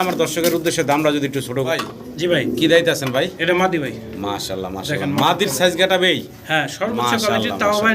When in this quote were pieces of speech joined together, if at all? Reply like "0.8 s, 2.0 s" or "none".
1.7 s

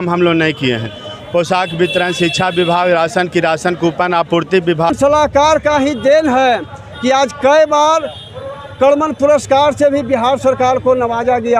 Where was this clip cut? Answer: 4.9 s

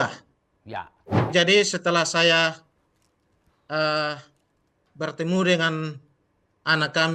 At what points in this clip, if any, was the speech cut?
1.3 s

